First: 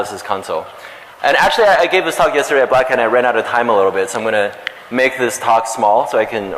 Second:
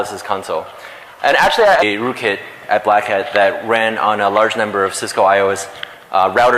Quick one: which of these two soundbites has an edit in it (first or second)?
first